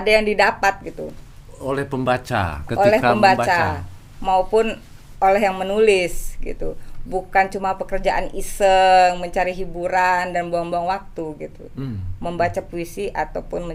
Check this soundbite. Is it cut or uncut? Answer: uncut